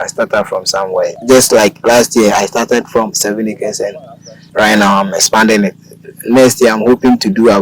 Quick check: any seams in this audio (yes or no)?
yes